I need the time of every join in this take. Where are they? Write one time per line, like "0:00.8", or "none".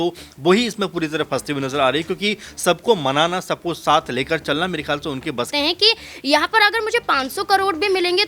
0:05.5